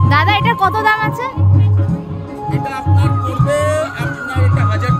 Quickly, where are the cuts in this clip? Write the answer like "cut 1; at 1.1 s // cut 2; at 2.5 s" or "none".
none